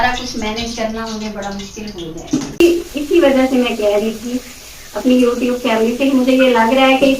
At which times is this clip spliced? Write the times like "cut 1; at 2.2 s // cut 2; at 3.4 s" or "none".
cut 1; at 2.6 s